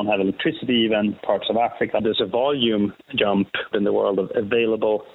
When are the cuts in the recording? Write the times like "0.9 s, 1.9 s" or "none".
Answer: 2.0 s, 3.7 s